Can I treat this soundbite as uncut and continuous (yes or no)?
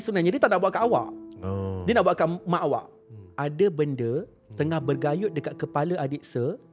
no